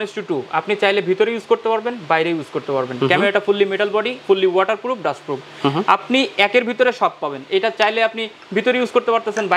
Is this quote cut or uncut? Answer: uncut